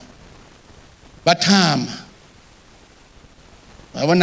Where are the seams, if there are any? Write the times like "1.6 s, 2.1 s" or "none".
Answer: none